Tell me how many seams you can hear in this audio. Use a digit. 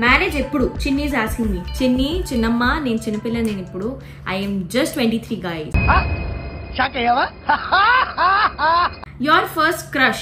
2